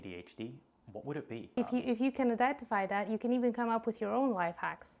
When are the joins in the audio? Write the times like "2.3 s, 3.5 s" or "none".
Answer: 1.5 s